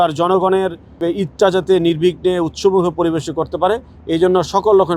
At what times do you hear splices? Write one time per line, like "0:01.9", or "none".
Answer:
none